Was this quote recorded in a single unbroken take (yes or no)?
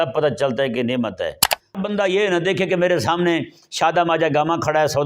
no